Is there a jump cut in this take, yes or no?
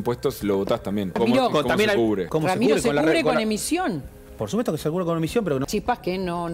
yes